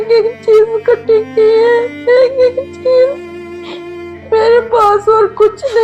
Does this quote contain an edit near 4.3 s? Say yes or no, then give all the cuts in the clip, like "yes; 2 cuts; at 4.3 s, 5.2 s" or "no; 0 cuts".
no; 0 cuts